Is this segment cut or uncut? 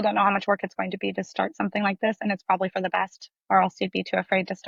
uncut